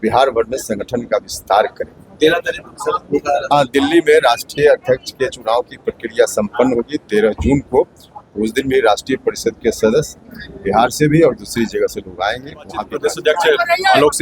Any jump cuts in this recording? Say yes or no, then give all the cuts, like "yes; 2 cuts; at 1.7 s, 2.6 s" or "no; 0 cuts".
yes; 1 cut; at 12.9 s